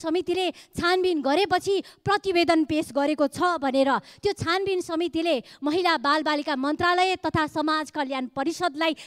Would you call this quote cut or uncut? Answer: uncut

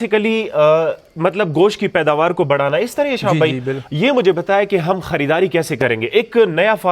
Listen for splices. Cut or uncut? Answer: uncut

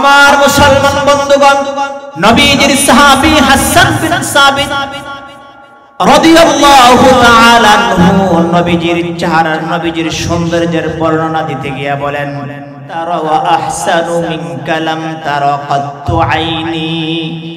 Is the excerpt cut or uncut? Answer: cut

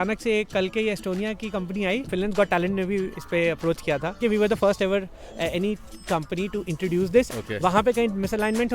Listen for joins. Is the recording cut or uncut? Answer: cut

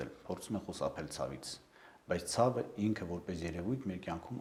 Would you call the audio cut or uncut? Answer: uncut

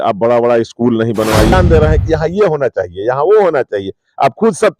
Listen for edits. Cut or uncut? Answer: cut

